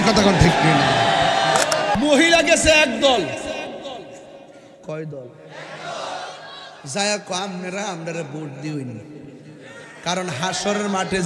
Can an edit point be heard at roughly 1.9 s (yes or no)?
yes